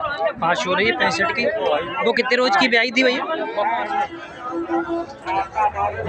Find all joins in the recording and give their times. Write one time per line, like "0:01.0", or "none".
0:03.9